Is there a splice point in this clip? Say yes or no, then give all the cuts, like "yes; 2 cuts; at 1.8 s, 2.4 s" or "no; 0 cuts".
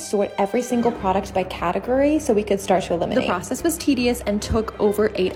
no; 0 cuts